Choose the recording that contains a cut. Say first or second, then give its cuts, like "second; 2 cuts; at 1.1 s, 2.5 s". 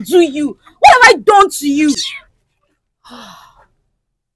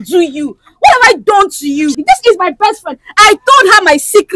second; 1 cut; at 2.0 s